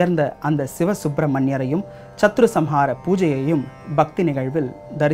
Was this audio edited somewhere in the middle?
yes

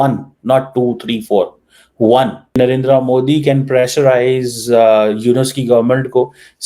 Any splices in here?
yes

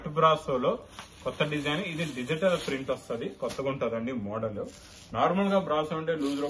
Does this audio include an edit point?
no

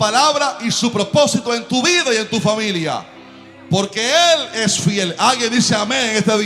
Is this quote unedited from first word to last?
yes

